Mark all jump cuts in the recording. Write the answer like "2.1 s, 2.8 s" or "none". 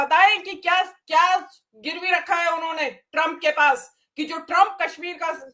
none

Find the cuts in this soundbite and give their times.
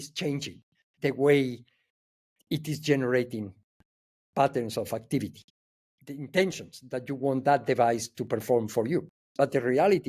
9.2 s

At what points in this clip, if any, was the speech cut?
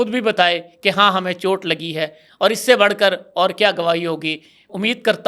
none

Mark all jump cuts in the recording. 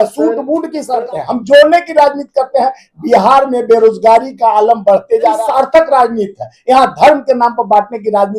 1.0 s, 5.4 s

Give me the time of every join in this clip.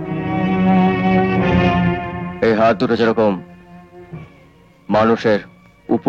none

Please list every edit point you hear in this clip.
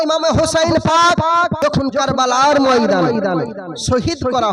1.5 s

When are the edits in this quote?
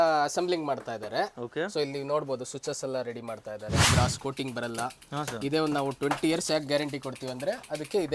3.9 s

